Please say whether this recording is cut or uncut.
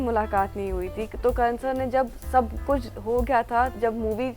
uncut